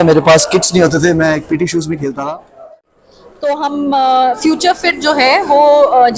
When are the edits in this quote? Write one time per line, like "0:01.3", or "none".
0:02.6